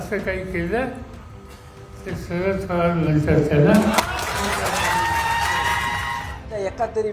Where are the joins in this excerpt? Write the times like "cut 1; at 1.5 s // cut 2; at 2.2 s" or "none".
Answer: cut 1; at 6.2 s